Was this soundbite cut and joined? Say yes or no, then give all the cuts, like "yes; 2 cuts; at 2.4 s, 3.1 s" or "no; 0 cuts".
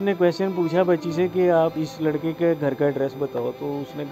yes; 1 cut; at 1.8 s